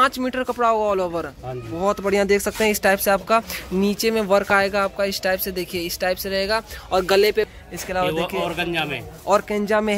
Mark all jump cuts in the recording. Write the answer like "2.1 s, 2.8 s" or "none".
7.4 s